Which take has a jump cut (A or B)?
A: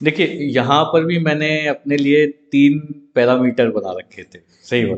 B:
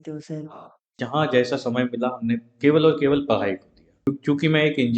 B